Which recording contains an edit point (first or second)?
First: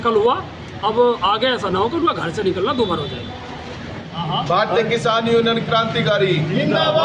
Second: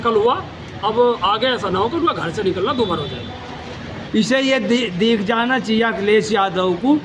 second